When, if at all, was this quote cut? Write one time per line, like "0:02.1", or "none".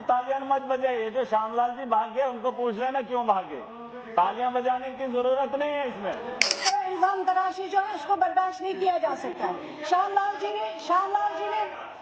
0:06.6